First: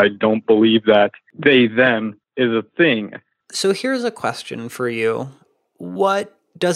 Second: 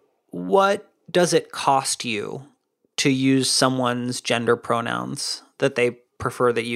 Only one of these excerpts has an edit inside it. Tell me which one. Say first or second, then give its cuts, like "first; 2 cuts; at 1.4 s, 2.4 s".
first; 3 cuts; at 1.3 s, 2.2 s, 3.4 s